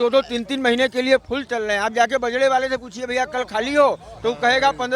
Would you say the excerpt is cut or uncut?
uncut